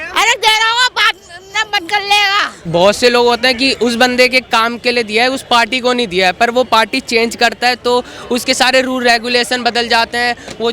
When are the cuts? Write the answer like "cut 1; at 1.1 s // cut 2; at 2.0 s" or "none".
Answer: cut 1; at 2.6 s